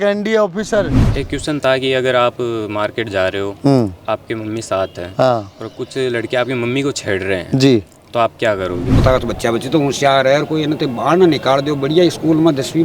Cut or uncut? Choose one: cut